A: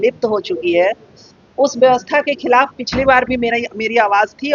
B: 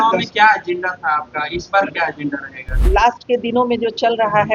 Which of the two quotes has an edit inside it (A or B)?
B